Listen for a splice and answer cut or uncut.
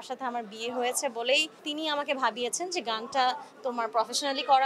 cut